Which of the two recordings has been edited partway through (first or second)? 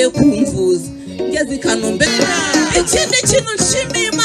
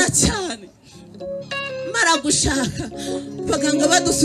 first